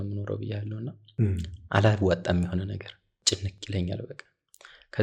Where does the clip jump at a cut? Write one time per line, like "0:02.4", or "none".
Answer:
0:03.1

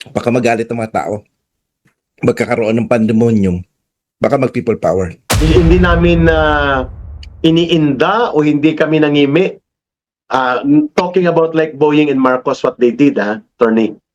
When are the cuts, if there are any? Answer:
0:05.2

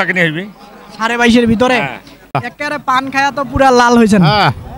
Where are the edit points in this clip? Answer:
0:02.3

